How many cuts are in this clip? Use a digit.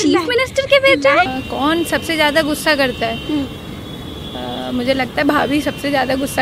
1